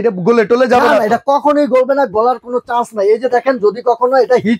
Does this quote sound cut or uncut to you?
uncut